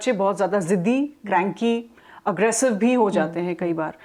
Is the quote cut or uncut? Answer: uncut